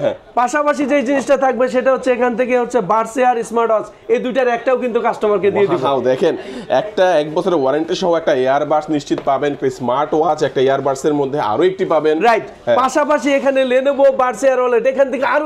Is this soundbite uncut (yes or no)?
yes